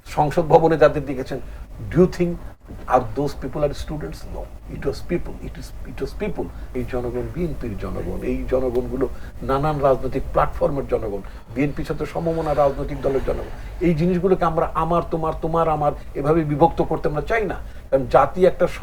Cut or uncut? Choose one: cut